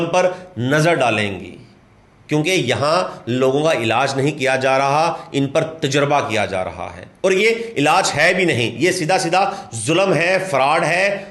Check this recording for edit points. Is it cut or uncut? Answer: uncut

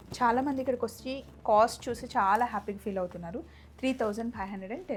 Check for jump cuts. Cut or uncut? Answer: uncut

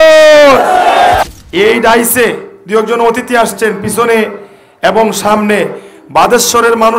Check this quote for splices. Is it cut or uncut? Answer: cut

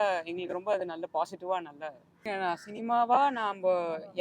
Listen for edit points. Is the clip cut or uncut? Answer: cut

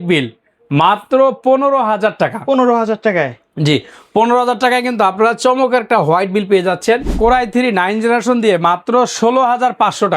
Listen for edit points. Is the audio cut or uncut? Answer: cut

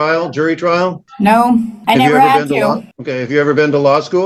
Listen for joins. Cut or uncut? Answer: uncut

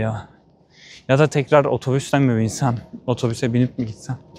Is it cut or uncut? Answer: uncut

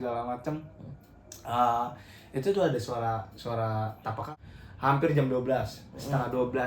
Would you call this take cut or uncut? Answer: cut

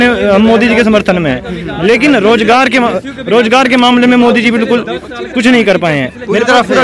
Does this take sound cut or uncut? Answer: uncut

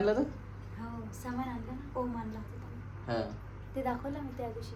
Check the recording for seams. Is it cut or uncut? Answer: uncut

